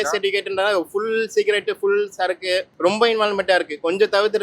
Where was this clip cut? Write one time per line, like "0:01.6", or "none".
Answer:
0:02.7

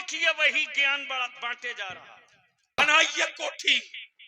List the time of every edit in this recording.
0:02.8

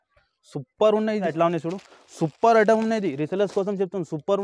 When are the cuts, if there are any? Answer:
0:01.2

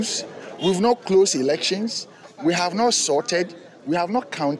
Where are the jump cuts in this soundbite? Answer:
none

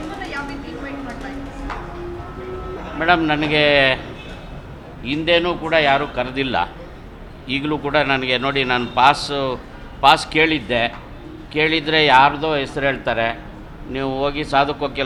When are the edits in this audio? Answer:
none

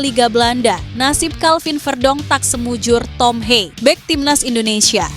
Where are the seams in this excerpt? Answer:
0:03.7

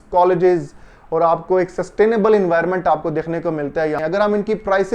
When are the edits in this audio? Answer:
0:04.0

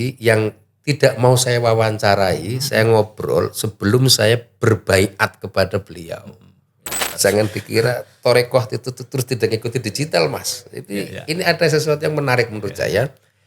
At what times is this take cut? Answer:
0:07.1

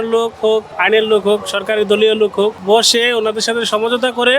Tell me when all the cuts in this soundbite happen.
0:02.6

